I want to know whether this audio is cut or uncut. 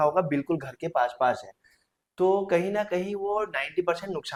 uncut